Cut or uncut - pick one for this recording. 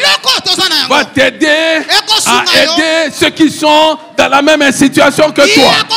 uncut